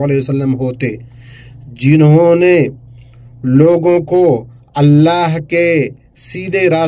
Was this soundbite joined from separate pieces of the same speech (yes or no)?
no